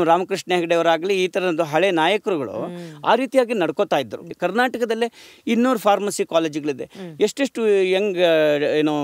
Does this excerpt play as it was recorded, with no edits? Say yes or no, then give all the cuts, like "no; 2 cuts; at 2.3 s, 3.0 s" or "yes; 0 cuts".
no; 1 cut; at 4.3 s